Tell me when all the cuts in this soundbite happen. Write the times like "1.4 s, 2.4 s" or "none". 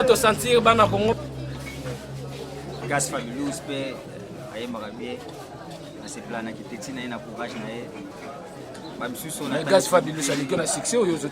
1.1 s